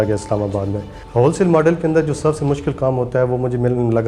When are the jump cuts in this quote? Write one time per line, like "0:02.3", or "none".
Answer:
0:00.9